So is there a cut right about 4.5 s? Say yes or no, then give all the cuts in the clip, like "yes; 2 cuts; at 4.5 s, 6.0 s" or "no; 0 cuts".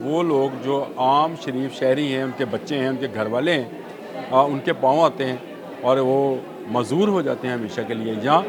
no; 0 cuts